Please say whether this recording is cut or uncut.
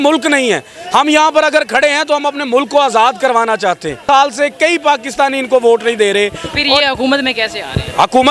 cut